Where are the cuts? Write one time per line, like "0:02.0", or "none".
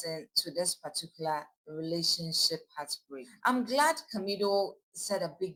none